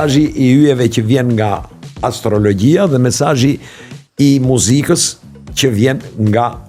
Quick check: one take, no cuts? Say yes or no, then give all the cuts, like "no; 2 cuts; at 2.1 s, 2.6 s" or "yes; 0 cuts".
yes; 0 cuts